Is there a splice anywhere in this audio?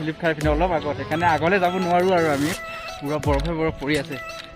yes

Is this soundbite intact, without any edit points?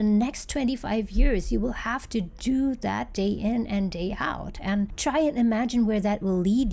yes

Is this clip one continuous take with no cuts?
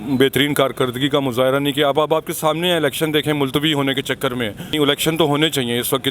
no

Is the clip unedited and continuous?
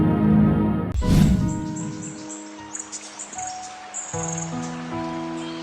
no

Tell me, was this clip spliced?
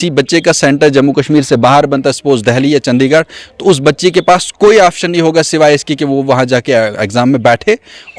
no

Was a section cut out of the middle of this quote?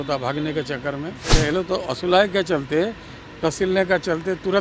yes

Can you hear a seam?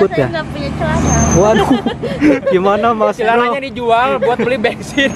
no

